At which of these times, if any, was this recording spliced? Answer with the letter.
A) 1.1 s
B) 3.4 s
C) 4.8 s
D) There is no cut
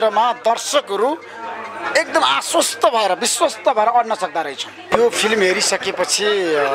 C